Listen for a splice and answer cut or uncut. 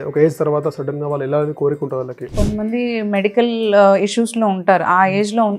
cut